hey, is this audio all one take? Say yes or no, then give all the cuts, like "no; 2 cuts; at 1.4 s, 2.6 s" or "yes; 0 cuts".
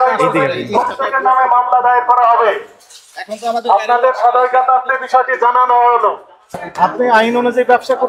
yes; 0 cuts